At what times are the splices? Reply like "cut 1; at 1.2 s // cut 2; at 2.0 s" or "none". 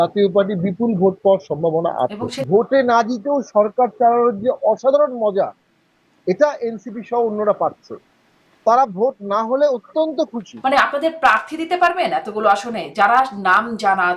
cut 1; at 2.3 s // cut 2; at 10.5 s